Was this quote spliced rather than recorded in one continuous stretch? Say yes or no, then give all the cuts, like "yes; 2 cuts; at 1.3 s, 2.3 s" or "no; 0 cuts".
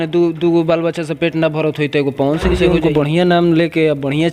yes; 1 cut; at 2.6 s